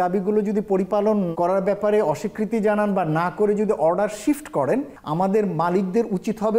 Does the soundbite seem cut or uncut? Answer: cut